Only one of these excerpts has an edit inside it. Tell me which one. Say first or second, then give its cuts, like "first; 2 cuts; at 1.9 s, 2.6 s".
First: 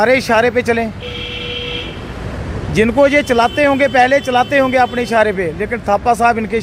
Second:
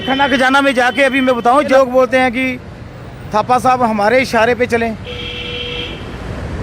second; 1 cut; at 1.7 s